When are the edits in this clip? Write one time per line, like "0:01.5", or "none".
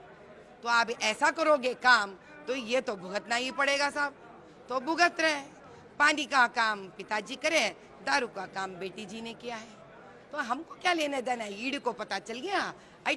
none